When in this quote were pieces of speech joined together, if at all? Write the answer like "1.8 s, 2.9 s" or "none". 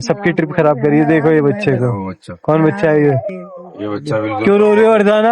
3.3 s